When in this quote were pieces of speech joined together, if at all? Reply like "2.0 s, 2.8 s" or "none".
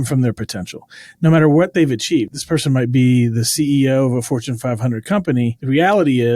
2.3 s, 5.6 s